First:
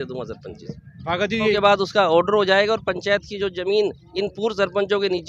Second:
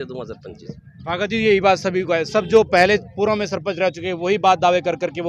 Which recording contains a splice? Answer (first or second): first